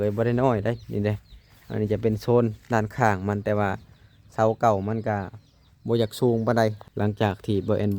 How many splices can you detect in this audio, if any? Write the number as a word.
one